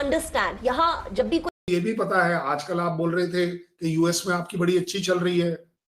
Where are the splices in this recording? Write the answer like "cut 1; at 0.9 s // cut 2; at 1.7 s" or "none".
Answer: cut 1; at 1.6 s